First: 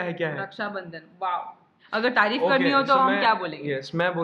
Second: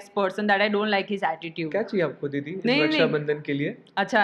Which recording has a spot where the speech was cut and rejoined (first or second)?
first